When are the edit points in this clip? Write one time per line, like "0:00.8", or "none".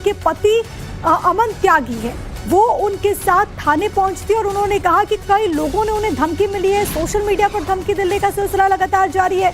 0:04.9